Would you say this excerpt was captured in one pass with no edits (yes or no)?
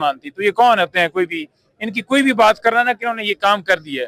yes